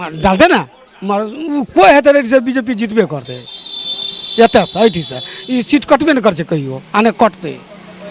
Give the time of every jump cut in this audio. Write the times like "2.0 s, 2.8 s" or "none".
none